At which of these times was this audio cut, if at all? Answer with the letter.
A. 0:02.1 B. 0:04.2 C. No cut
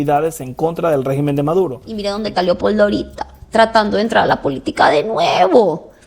A